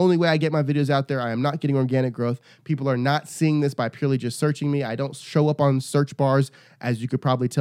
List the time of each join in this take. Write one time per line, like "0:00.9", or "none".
none